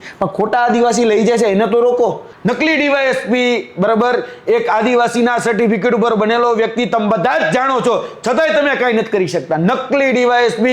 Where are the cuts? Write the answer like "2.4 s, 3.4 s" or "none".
2.3 s